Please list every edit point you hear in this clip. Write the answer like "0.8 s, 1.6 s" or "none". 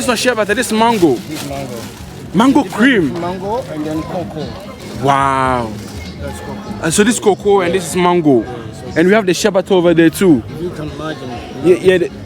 none